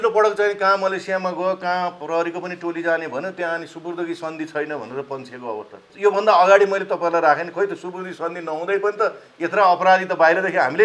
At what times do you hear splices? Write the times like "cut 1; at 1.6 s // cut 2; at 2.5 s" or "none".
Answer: cut 1; at 5.8 s